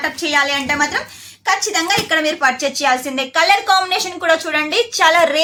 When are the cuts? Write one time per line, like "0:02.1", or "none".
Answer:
none

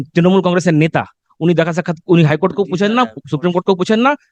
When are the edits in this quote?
none

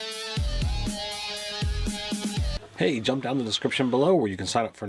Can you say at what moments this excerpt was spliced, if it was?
0:02.5

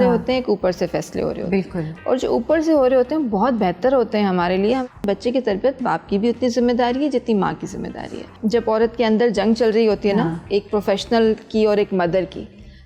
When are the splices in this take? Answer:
0:04.9
0:08.3

